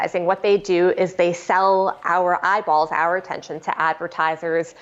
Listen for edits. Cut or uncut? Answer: uncut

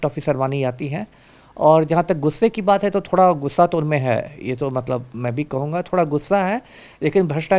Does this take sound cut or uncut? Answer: uncut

